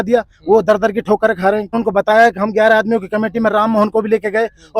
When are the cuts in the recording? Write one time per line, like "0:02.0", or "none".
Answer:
0:01.8

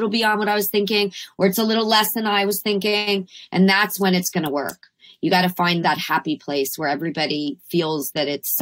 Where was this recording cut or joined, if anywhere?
0:05.8

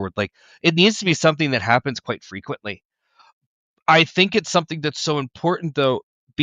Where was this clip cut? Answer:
none

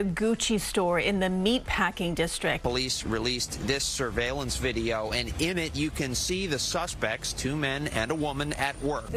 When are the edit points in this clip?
none

